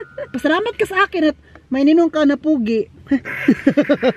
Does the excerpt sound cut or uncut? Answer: uncut